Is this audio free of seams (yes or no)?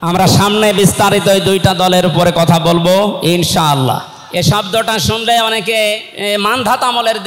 no